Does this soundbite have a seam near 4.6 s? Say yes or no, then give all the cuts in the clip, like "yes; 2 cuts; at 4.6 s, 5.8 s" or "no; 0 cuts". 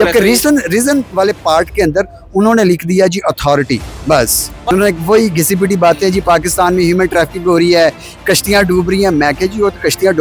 yes; 1 cut; at 4.6 s